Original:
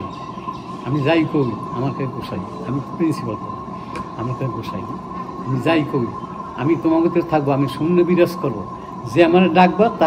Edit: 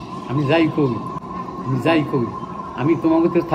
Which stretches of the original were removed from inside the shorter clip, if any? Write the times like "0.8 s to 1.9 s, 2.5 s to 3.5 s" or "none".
1.7 s to 4.9 s

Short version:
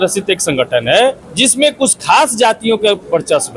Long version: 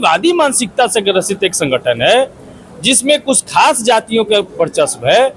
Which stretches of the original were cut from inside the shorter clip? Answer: 2.4 s to 2.7 s

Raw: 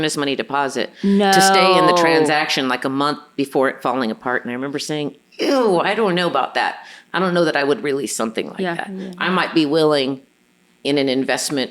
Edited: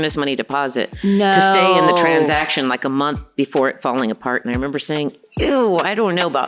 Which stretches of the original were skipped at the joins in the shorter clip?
none

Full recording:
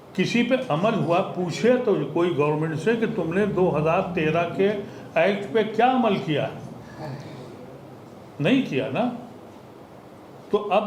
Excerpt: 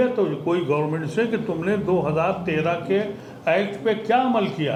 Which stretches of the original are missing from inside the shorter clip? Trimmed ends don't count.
none

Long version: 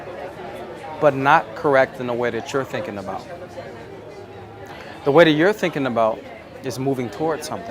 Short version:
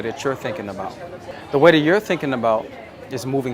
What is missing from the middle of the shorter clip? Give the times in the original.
3.6 s to 4.8 s

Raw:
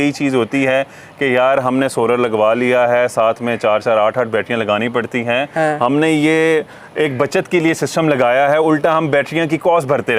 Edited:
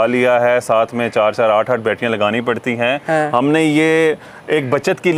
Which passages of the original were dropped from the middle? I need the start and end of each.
none

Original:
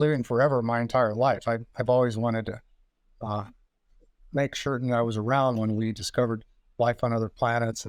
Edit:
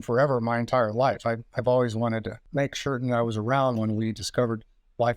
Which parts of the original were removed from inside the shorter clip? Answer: 2.6 s to 4.2 s

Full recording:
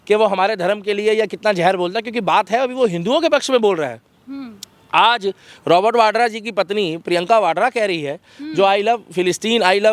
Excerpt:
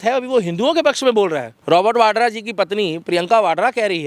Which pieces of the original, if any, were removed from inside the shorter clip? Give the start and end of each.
4.0 s to 5.5 s

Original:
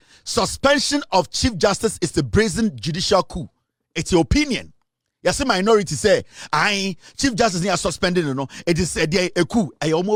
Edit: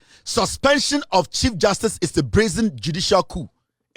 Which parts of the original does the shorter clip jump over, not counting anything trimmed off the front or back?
none

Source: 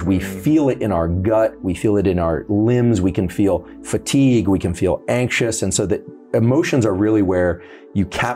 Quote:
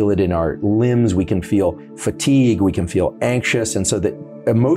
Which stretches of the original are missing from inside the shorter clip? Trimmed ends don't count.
none

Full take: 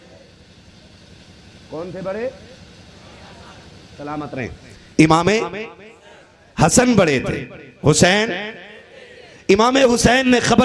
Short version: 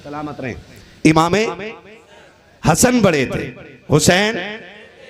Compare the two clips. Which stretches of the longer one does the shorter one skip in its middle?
none

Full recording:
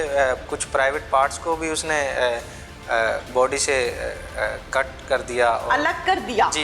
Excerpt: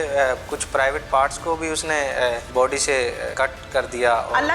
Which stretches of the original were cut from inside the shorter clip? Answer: 2.5 s to 3.3 s, 4.1 s to 4.6 s

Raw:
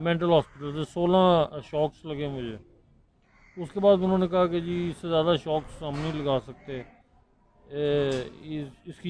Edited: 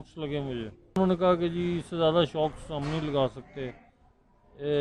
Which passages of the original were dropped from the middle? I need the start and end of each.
2.8 s to 4.1 s

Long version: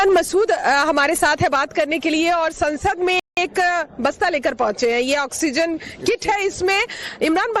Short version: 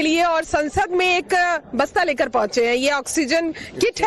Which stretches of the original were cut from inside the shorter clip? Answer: 3.2 s to 3.4 s

